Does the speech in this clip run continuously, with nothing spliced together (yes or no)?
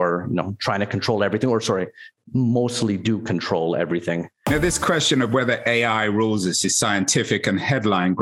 no